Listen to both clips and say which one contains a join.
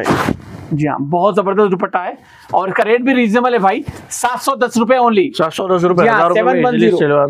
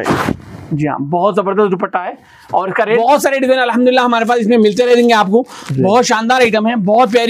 second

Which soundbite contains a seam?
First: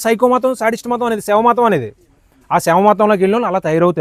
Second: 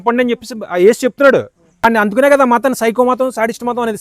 second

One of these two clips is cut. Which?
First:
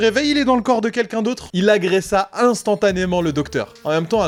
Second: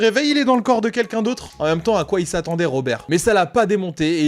second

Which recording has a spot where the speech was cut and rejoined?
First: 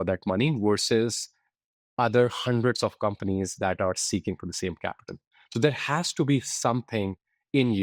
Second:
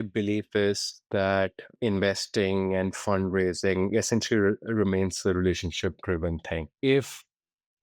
second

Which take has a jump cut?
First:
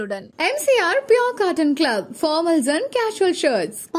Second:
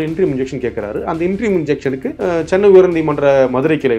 second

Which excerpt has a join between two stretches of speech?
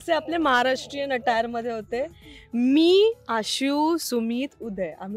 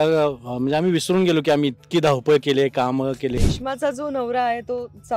second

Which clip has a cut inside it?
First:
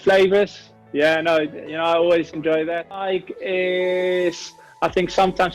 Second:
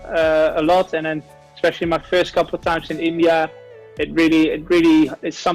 first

